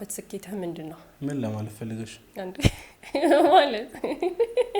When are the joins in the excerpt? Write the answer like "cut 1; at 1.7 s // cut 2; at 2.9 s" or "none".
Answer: cut 1; at 1.0 s